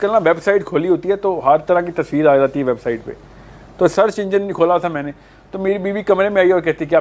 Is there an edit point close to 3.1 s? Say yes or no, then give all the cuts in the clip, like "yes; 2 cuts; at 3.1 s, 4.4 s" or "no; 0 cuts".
no; 0 cuts